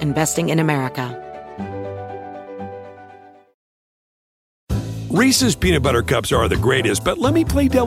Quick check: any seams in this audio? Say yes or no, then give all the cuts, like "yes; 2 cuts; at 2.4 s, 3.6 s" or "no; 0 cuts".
yes; 1 cut; at 1.1 s